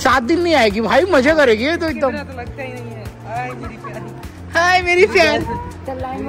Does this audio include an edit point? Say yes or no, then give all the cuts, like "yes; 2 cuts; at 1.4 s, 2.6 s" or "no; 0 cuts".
no; 0 cuts